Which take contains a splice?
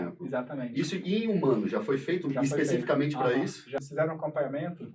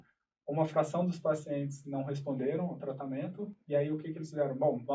first; 1 cut; at 3.8 s

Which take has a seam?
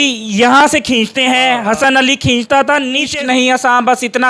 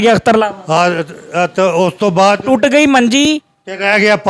first; 1 cut; at 3.1 s

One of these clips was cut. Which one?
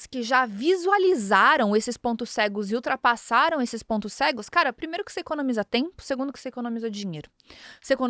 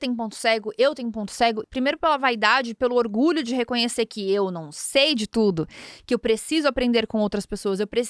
second; 1 cut; at 1.6 s

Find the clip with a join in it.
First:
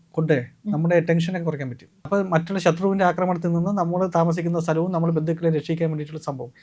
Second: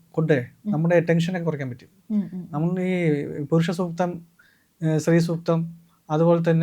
first; 1 cut; at 1.9 s

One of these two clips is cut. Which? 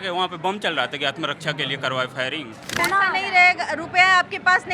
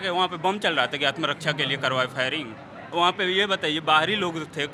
first; 1 cut; at 2.8 s

